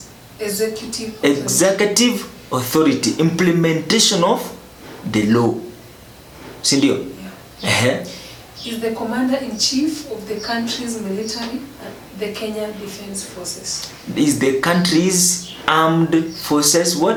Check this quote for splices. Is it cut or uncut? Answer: uncut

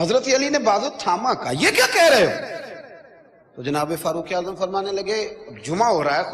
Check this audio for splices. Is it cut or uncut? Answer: uncut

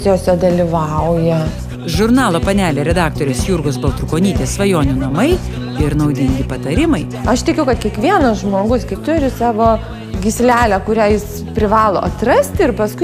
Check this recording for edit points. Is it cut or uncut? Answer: uncut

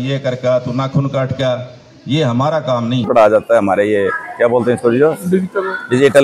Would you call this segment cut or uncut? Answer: cut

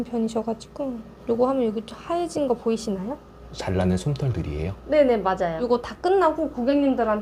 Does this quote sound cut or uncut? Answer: cut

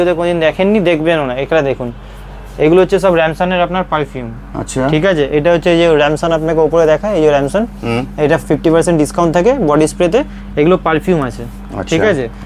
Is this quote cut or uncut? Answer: uncut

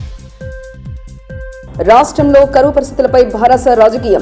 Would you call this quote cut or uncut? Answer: cut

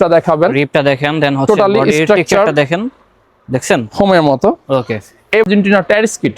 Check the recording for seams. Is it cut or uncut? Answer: cut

